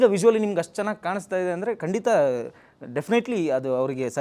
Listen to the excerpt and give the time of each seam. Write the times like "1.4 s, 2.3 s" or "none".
none